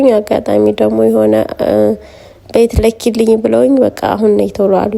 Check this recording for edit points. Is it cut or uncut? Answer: uncut